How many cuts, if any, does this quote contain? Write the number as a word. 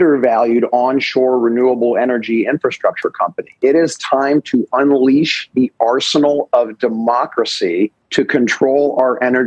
zero